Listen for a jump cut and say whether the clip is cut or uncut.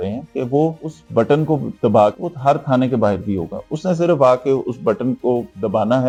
uncut